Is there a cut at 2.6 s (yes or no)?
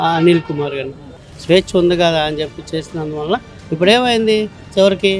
no